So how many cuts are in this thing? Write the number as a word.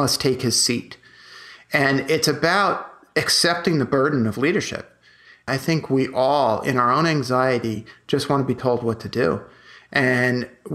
one